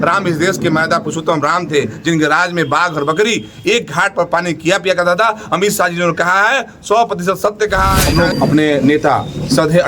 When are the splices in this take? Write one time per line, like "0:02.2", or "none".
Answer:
0:08.0